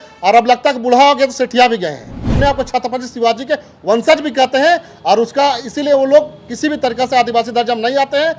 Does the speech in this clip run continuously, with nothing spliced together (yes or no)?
no